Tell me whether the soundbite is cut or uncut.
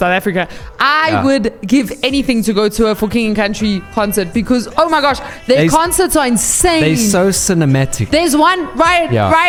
uncut